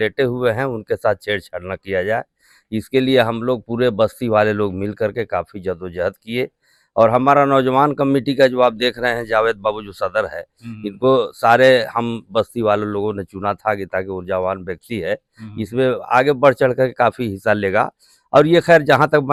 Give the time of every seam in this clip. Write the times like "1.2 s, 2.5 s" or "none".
none